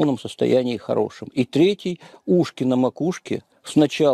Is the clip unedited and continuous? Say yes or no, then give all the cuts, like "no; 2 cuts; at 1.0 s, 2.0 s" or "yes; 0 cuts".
yes; 0 cuts